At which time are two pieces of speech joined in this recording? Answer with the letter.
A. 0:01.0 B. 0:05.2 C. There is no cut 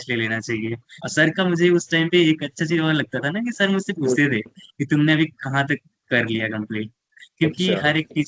A